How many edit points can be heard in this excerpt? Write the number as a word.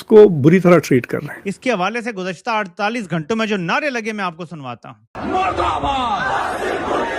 two